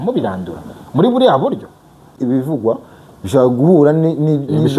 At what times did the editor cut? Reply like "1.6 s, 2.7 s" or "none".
2.2 s